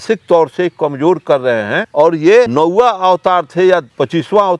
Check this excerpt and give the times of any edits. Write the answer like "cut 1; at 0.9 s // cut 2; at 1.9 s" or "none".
cut 1; at 1.8 s // cut 2; at 2.5 s